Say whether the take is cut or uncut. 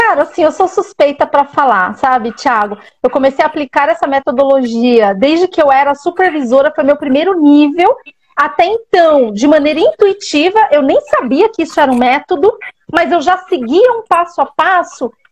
uncut